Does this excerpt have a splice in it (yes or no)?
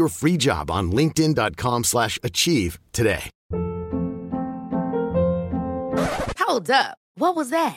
yes